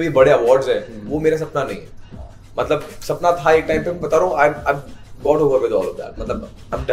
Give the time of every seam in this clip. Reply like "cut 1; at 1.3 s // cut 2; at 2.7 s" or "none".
none